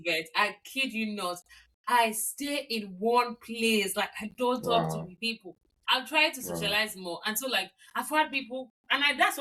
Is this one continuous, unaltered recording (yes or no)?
yes